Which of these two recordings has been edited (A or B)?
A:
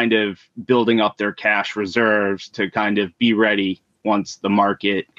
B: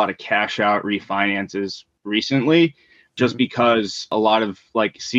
B